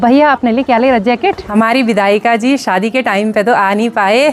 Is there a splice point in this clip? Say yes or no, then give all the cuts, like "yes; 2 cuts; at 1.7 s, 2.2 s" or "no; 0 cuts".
yes; 1 cut; at 1.4 s